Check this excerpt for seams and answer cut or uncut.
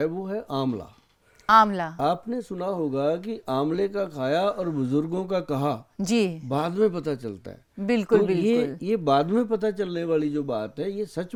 uncut